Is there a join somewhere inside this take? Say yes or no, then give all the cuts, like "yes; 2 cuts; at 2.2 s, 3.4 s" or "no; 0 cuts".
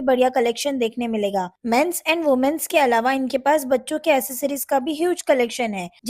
yes; 1 cut; at 4.8 s